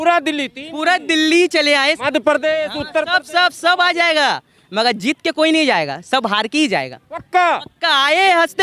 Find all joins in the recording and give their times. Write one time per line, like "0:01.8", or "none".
none